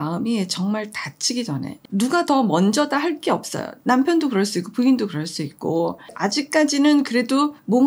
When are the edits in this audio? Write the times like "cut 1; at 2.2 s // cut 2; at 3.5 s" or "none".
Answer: none